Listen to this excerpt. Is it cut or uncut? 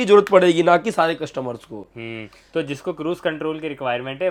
uncut